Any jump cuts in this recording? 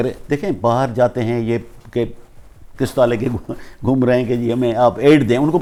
no; 0 cuts

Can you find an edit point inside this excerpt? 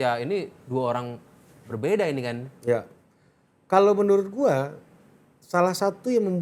no; 0 cuts

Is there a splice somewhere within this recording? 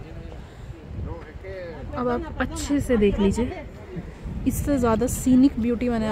no; 0 cuts

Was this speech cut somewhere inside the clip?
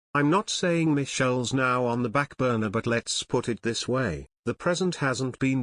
no; 0 cuts

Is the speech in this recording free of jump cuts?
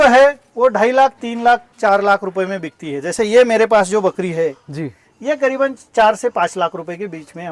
yes; 0 cuts

